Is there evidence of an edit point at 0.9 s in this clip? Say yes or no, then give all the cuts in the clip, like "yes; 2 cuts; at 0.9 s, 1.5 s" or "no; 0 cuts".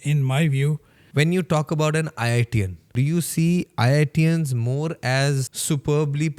yes; 3 cuts; at 0.9 s, 2.9 s, 5.5 s